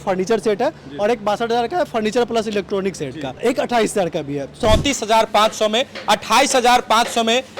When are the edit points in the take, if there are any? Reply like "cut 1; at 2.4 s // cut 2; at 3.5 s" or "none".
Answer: cut 1; at 3.4 s // cut 2; at 4.6 s